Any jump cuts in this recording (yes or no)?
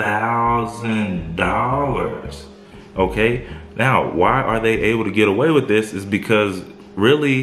no